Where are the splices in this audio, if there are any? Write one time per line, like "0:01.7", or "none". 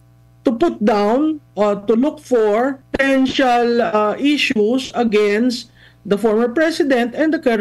0:02.8

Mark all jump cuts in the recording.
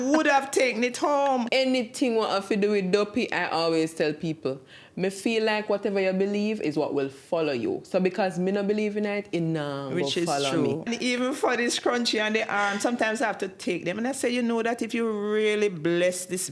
0:01.5
0:10.9

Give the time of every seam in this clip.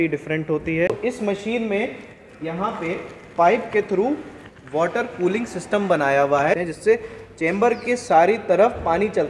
0:00.9
0:06.6

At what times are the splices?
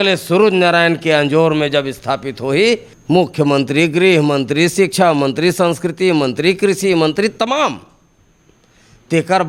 0:02.9

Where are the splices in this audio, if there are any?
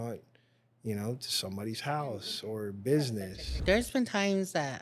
0:03.6

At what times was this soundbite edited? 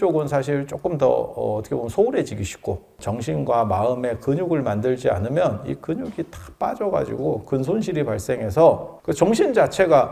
0:02.9
0:08.9

